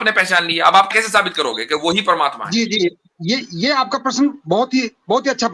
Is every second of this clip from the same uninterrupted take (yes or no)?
no